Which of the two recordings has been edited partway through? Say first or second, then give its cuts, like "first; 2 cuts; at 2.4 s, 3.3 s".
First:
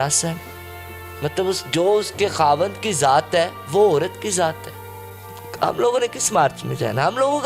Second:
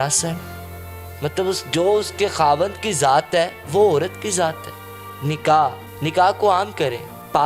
first; 1 cut; at 5.3 s